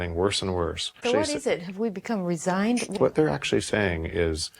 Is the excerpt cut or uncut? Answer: cut